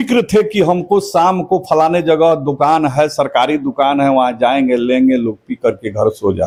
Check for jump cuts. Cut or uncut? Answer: uncut